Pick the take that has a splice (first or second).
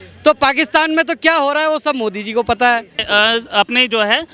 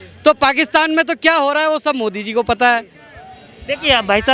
first